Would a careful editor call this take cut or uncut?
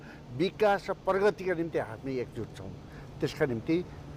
uncut